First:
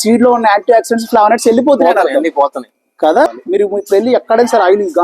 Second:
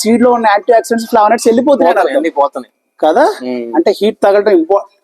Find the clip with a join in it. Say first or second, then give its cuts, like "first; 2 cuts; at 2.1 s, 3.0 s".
first; 1 cut; at 3.4 s